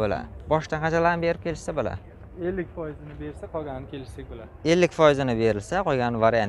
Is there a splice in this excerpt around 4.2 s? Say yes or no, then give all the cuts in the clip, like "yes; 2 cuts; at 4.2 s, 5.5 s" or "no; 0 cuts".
no; 0 cuts